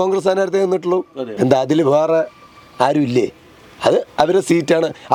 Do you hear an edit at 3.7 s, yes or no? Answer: no